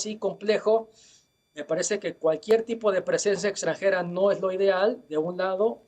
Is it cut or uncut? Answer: uncut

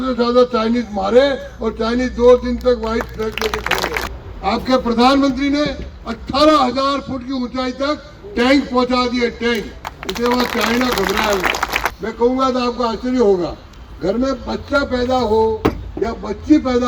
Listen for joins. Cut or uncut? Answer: cut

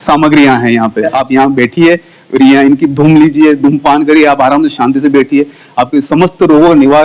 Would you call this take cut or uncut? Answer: cut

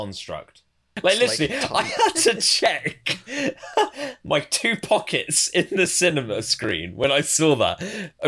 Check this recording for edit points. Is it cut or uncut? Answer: cut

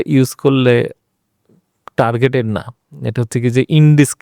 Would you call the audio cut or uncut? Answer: uncut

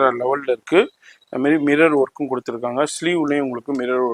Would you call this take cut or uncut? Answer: uncut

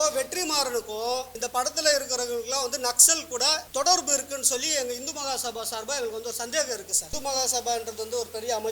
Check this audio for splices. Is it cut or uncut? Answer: cut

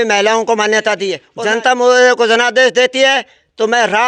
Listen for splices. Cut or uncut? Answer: cut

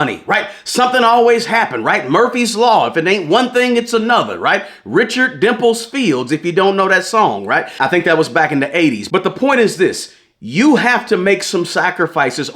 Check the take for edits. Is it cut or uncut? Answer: uncut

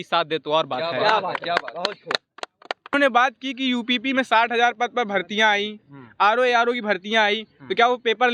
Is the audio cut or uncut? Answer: cut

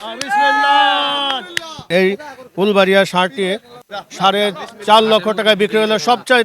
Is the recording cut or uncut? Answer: cut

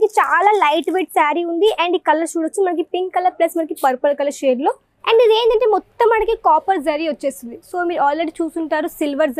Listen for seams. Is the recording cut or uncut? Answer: cut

